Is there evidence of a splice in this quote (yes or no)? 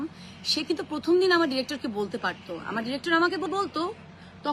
no